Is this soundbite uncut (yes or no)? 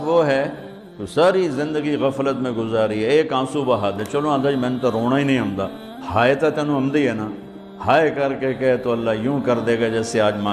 yes